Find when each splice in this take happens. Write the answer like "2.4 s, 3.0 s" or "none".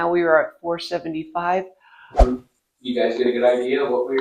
2.2 s